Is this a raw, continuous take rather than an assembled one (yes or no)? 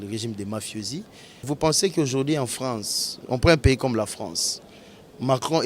no